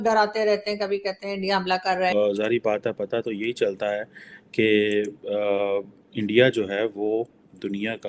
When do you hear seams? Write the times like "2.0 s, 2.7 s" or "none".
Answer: 2.1 s

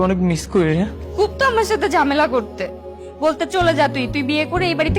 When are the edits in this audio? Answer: 1.0 s

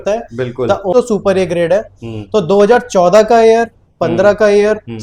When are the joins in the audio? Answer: 0.9 s

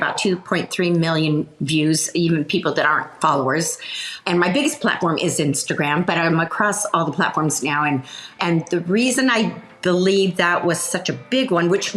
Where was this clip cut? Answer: 4.1 s, 8.4 s

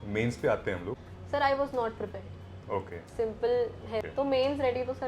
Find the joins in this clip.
1.1 s, 4.1 s

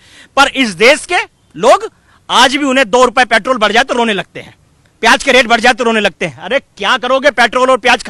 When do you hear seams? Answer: none

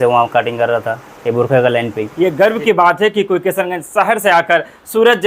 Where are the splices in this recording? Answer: 2.1 s

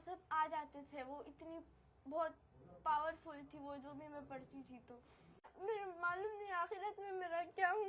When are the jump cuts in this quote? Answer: 5.5 s

